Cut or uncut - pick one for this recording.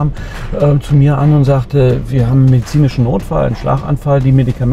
uncut